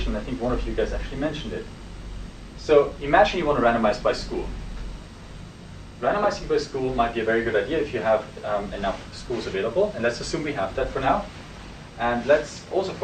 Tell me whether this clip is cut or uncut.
uncut